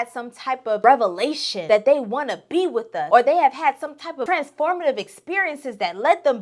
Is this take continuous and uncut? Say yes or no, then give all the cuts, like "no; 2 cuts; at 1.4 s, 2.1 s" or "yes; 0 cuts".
no; 4 cuts; at 0.8 s, 1.5 s, 3.0 s, 4.2 s